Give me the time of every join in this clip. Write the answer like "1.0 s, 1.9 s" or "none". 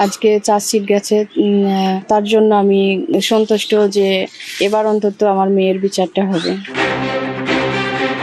6.9 s